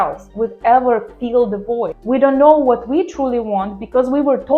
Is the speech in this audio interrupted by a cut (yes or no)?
yes